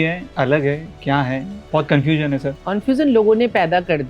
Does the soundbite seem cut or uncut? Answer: cut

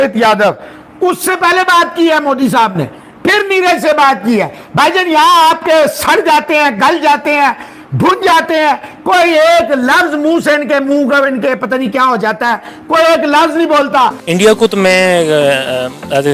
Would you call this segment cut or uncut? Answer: cut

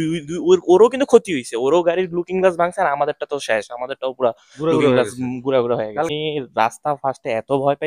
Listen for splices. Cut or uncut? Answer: cut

